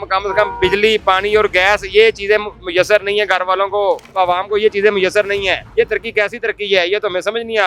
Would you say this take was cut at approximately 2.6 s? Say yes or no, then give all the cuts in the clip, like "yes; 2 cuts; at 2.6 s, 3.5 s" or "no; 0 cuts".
no; 2 cuts; at 4.1 s, 5.6 s